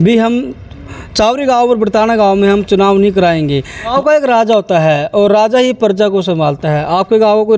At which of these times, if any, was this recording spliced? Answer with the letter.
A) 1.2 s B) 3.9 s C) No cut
B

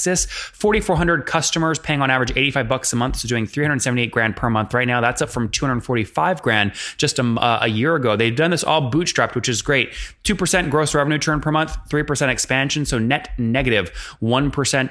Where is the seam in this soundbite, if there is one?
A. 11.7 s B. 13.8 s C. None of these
C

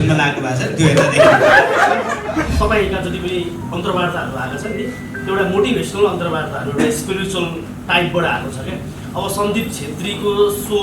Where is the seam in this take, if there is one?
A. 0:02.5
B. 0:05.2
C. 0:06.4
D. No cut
A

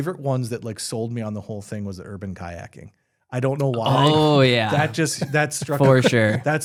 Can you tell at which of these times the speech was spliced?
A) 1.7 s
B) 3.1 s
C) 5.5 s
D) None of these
D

